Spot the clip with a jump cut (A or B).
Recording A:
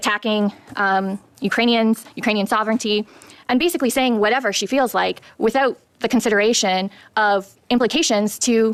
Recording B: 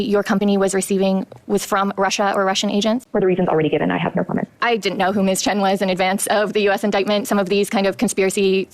B